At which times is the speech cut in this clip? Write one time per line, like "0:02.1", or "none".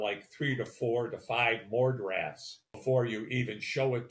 0:02.8